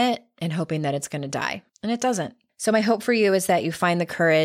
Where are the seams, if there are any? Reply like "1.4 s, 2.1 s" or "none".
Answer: 1.7 s, 2.4 s